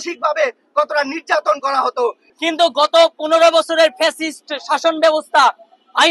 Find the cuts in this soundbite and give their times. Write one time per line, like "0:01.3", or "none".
0:02.3